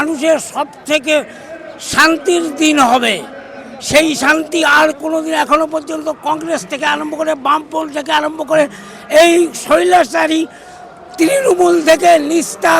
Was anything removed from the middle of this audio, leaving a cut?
no; 0 cuts

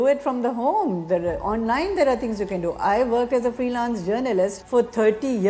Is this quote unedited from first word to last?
no; 1 cut; at 4.6 s

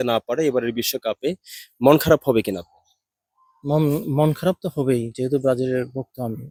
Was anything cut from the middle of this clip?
no; 0 cuts

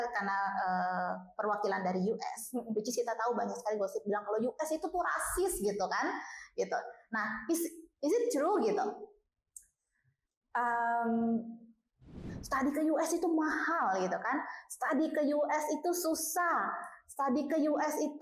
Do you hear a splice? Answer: yes; 1 cut; at 12.4 s

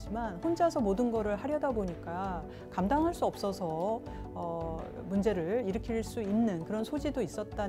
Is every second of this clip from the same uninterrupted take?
yes; 0 cuts

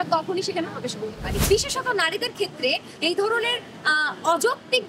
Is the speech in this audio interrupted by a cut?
yes; 1 cut; at 1.3 s

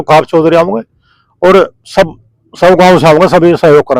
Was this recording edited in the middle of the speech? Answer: no; 0 cuts

